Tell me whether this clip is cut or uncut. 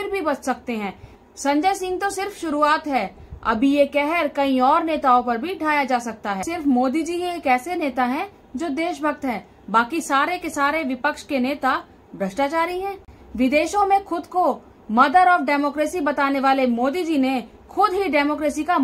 cut